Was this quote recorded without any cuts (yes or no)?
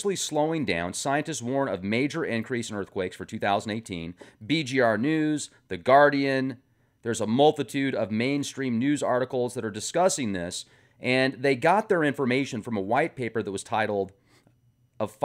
no